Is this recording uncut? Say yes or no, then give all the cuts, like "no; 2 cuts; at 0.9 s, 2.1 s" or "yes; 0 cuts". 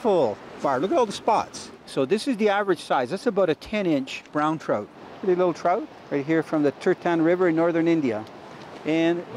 no; 3 cuts; at 1.6 s, 4.7 s, 6.0 s